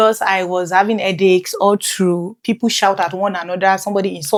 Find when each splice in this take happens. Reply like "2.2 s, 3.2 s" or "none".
none